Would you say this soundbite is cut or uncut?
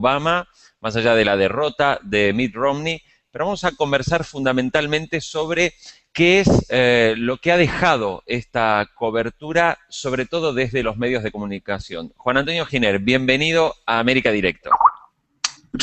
cut